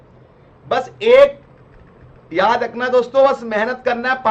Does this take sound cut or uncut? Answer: uncut